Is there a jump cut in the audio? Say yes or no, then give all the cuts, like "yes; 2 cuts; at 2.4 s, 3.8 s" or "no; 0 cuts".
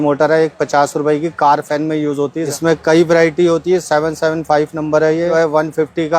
yes; 2 cuts; at 2.5 s, 5.3 s